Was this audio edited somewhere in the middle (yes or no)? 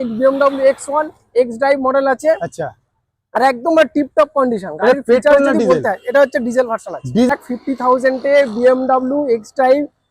yes